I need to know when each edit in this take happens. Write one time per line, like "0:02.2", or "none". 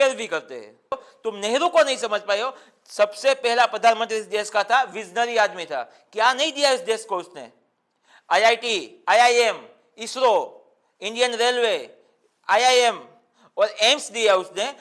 0:01.1